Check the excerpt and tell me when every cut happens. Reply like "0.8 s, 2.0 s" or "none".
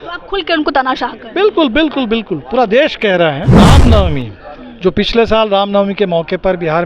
3.6 s